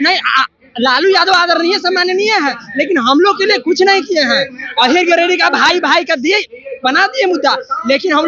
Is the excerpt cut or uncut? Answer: uncut